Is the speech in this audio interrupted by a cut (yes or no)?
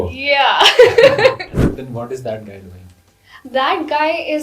yes